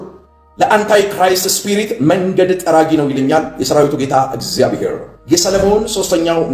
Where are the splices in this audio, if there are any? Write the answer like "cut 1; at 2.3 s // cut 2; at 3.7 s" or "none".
cut 1; at 5.1 s

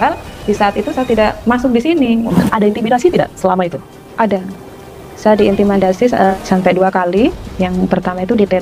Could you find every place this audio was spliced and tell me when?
cut 1; at 1.8 s // cut 2; at 2.3 s // cut 3; at 6.3 s

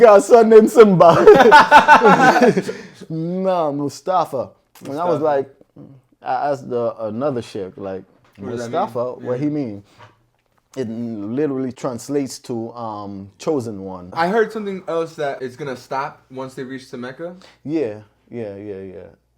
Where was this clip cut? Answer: cut 1; at 11.8 s // cut 2; at 14.1 s // cut 3; at 15.4 s

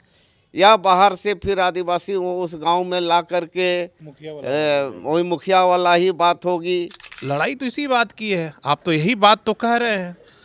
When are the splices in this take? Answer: cut 1; at 7.2 s

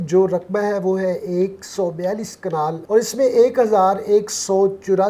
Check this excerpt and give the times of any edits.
cut 1; at 2.8 s

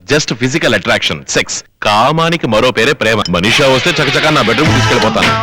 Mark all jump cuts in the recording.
cut 1; at 1.6 s // cut 2; at 3.2 s

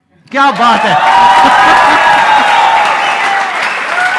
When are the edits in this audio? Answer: none

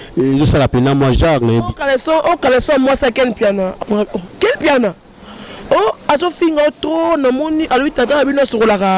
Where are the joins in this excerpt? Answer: cut 1; at 3.7 s

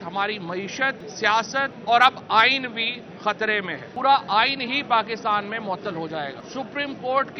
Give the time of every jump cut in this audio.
cut 1; at 1.5 s // cut 2; at 3.9 s // cut 3; at 6.4 s

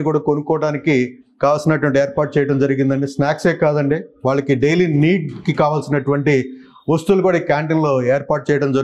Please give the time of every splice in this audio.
none

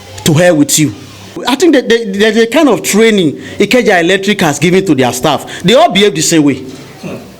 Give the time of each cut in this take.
cut 1; at 1.4 s

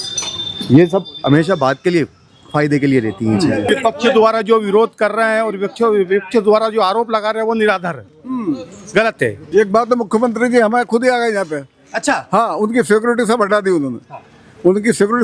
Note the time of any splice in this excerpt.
cut 1; at 3.6 s // cut 2; at 9.4 s

